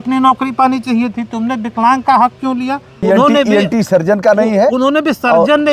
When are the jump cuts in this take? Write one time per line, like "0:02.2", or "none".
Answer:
0:02.9